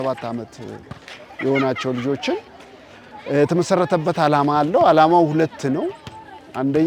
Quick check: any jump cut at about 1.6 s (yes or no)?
no